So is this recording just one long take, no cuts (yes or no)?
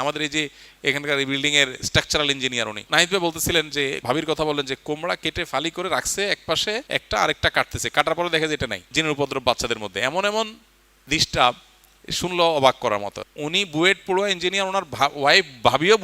no